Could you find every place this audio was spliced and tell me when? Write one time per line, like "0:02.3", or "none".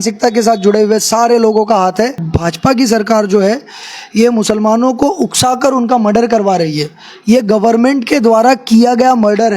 0:02.3